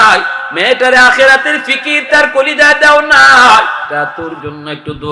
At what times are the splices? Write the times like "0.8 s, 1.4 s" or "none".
3.8 s